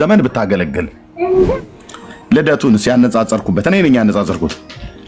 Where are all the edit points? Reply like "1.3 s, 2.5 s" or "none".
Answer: 1.6 s